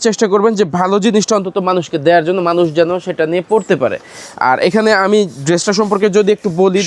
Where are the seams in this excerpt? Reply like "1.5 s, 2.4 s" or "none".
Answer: none